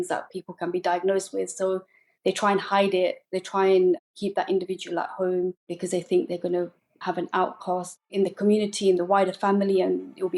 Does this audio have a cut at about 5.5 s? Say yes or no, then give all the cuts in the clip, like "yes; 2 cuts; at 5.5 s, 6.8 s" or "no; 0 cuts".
no; 1 cut; at 7.0 s